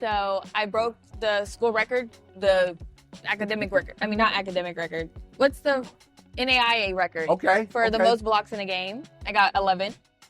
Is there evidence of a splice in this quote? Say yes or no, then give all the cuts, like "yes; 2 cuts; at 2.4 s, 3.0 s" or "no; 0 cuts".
no; 0 cuts